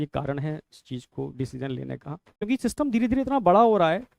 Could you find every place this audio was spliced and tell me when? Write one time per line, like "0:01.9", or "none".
0:02.4